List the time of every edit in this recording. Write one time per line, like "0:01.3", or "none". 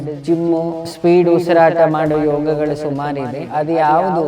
0:00.9
0:03.4